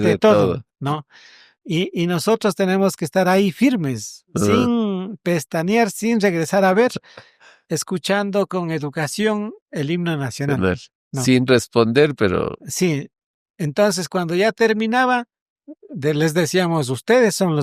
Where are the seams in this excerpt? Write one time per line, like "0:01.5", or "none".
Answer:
none